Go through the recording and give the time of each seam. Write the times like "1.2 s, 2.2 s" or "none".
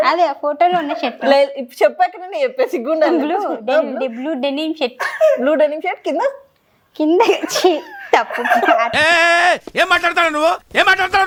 none